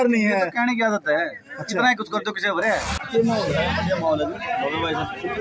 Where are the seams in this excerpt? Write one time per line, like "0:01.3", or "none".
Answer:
0:03.0